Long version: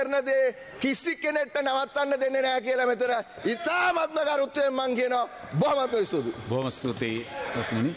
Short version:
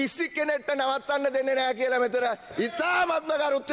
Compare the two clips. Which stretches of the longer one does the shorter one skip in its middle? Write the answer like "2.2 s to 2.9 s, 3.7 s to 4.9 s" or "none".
none